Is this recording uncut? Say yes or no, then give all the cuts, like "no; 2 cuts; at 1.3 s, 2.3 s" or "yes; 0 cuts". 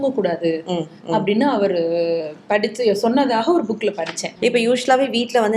no; 1 cut; at 4.2 s